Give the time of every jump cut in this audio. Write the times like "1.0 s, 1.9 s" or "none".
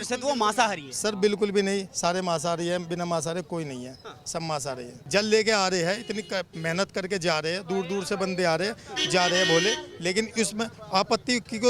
4.9 s